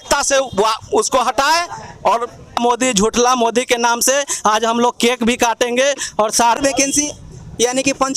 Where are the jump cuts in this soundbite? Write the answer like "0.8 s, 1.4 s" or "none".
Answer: 2.6 s, 6.6 s

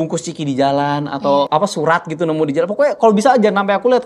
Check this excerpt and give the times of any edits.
1.5 s

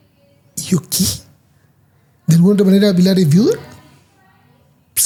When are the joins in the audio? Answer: none

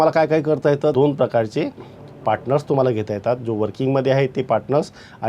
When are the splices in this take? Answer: 0.9 s

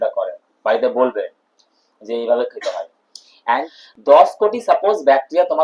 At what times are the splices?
3.7 s

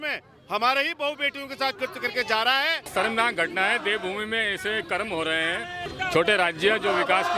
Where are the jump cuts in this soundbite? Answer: 2.9 s, 5.9 s

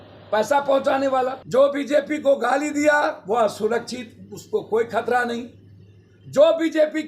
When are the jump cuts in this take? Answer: 1.4 s

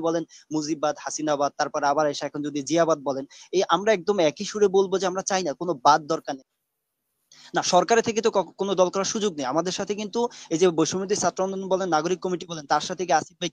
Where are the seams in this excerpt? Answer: 6.4 s

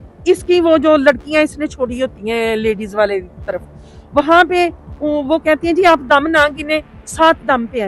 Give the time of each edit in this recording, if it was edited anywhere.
none

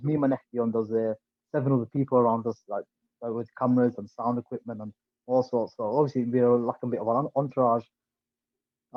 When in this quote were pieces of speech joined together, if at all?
none

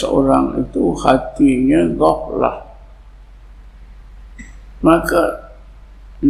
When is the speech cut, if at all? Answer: none

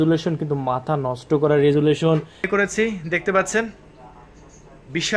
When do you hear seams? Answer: 2.5 s

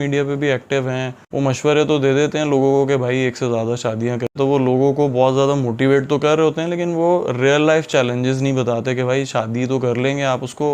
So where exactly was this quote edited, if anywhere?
4.3 s

